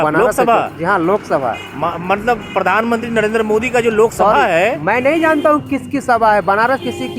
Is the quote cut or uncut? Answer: uncut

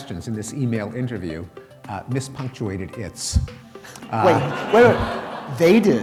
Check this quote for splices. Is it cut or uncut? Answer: uncut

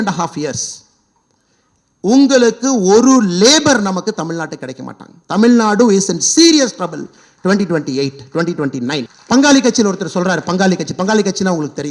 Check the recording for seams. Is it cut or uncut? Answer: cut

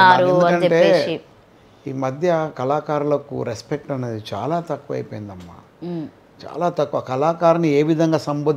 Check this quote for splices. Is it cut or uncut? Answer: uncut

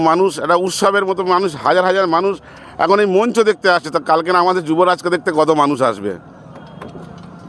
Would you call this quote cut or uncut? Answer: uncut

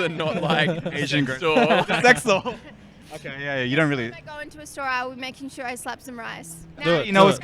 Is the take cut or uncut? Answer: uncut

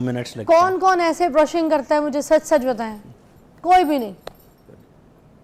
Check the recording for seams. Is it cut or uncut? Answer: uncut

